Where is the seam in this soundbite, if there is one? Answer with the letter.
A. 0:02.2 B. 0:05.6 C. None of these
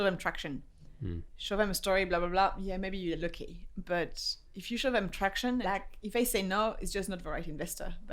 B